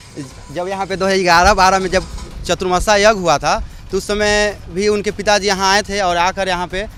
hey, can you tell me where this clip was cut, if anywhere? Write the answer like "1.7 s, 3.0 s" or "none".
none